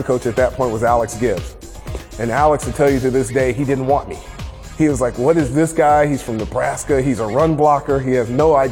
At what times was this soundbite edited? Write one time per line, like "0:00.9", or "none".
none